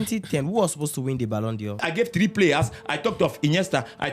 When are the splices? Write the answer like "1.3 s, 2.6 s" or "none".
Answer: 1.9 s